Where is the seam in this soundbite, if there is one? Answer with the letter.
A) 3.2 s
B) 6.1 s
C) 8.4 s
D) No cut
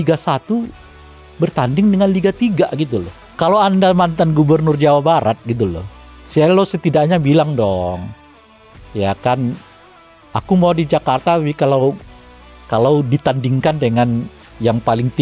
A